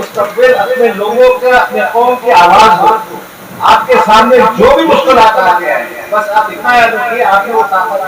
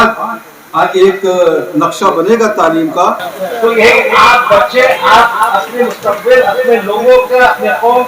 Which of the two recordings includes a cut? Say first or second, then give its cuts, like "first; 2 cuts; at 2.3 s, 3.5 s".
second; 1 cut; at 3.2 s